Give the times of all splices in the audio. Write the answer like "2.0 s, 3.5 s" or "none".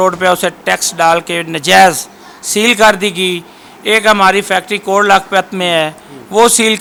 none